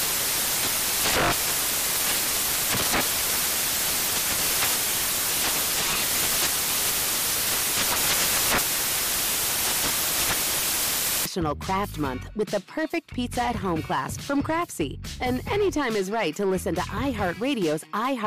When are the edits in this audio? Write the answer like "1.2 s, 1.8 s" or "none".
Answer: none

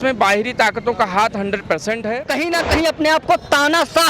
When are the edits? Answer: 2.3 s

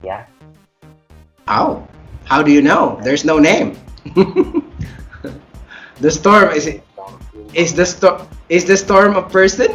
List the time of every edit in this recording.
none

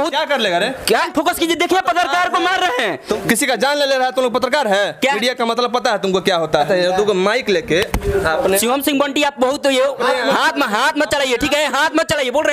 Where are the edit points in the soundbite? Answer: 1.1 s, 3.1 s, 5.2 s, 6.7 s

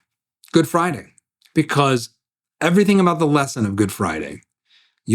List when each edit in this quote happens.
none

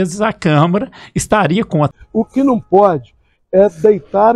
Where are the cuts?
2.0 s

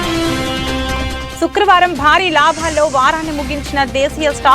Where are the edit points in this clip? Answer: 1.0 s

